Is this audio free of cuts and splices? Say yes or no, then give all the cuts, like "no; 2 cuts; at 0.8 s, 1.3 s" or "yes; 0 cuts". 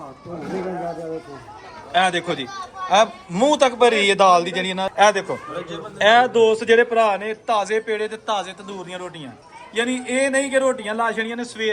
no; 1 cut; at 4.9 s